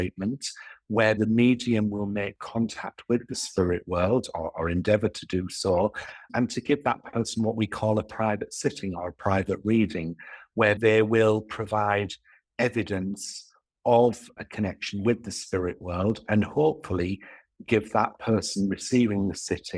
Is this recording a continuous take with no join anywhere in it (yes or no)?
no